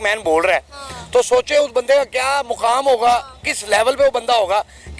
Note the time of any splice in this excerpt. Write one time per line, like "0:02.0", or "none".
none